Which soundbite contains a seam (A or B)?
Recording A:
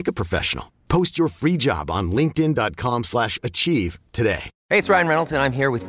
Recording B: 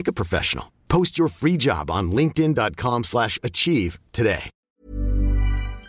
B